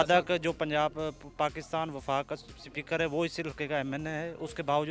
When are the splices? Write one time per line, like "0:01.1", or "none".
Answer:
none